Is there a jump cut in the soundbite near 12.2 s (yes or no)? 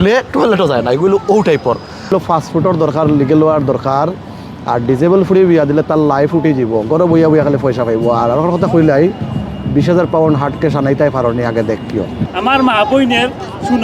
yes